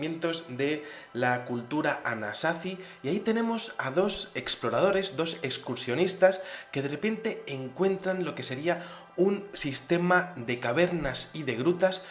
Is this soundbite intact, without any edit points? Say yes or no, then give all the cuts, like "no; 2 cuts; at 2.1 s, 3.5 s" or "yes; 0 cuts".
no; 1 cut; at 8.0 s